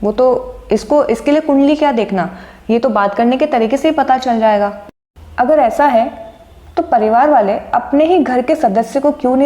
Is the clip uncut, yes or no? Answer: no